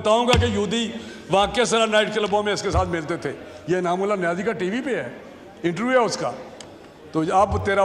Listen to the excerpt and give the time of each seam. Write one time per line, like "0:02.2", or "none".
none